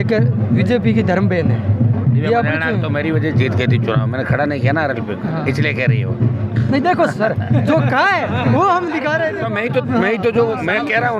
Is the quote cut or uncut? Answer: uncut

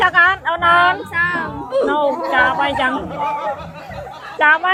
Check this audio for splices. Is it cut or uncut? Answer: uncut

